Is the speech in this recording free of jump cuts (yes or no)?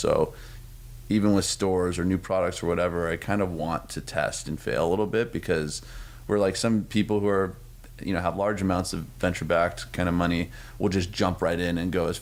yes